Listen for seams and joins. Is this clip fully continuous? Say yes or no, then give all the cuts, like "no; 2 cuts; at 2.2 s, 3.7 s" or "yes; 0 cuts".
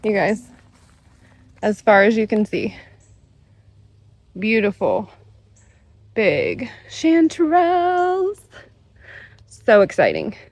yes; 0 cuts